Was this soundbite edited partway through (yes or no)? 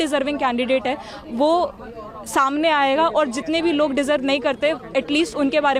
no